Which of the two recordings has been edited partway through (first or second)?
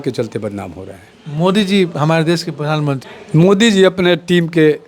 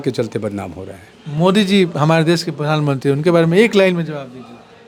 first